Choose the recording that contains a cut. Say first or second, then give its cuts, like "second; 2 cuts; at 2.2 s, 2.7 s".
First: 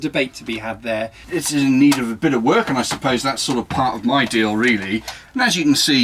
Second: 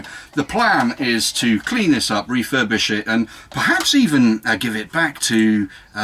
first; 2 cuts; at 1.2 s, 5.2 s